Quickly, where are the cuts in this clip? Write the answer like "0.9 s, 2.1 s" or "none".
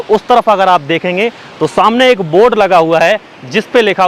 none